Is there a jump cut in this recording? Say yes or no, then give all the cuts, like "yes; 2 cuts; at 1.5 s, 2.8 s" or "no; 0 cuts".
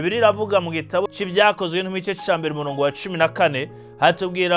yes; 1 cut; at 1.1 s